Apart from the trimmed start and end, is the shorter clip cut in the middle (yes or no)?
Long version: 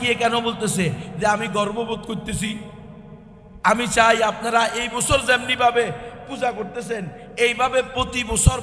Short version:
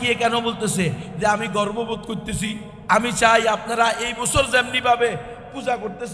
yes